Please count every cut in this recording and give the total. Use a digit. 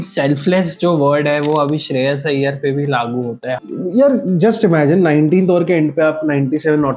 1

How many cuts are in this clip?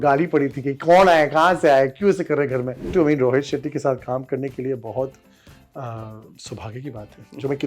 1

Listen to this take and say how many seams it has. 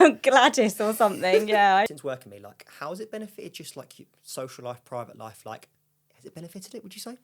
1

